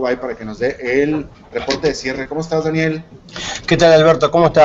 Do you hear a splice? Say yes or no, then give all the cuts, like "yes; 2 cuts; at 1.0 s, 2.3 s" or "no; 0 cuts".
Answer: no; 0 cuts